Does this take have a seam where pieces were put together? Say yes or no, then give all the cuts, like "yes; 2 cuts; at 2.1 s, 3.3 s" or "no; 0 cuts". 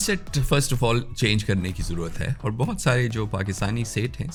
no; 0 cuts